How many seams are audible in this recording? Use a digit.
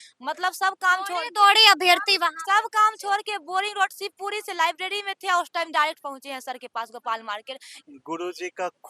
1